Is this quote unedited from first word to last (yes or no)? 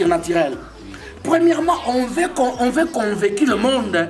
yes